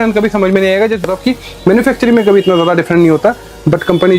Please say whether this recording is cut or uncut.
cut